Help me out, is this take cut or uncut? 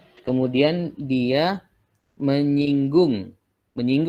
uncut